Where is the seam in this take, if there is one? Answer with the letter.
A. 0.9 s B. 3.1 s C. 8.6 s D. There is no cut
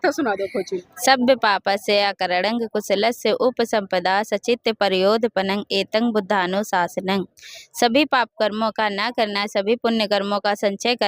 A